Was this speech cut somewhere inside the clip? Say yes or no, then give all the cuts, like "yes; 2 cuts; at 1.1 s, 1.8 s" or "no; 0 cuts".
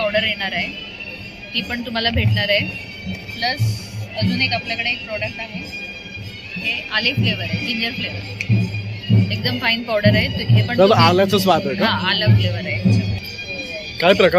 yes; 1 cut; at 13.2 s